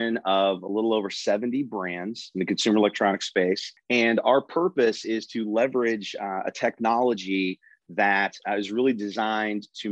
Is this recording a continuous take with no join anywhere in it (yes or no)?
no